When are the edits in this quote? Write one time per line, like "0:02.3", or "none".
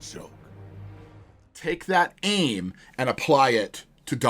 0:01.7